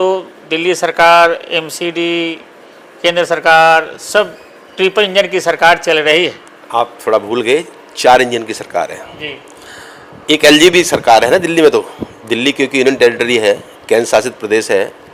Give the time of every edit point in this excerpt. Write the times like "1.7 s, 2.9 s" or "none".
none